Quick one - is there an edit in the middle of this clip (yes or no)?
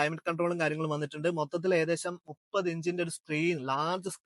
no